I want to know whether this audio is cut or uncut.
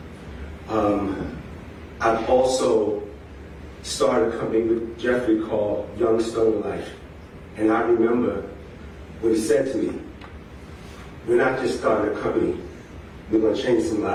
uncut